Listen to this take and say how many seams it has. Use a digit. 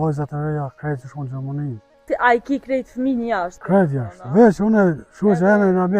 1